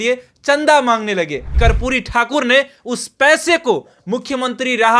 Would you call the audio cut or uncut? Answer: cut